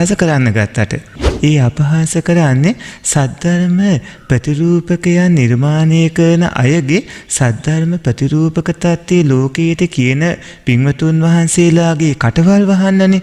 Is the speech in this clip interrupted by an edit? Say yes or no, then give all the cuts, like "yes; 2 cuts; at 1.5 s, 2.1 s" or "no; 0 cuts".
yes; 1 cut; at 1.3 s